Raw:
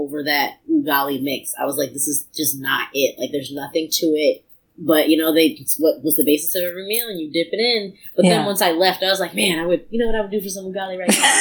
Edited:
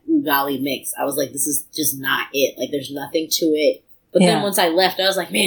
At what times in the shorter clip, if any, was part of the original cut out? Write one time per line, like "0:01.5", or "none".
0:03.9